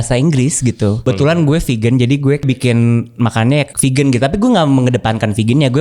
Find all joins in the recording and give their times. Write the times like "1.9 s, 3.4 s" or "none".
1.0 s, 2.4 s, 3.7 s

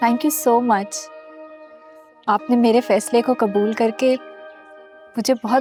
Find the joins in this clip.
none

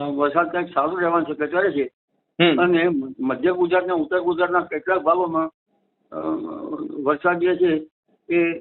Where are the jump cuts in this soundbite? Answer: none

